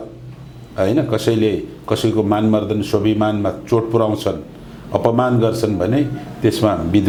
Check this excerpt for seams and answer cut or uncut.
uncut